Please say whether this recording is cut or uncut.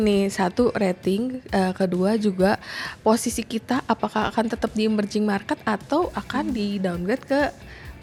uncut